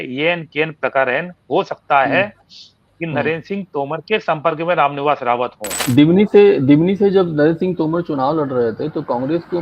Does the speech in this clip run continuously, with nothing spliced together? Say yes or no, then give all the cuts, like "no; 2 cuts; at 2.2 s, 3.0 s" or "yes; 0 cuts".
no; 1 cut; at 5.8 s